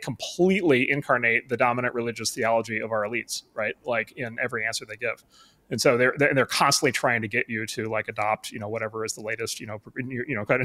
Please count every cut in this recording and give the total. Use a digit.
0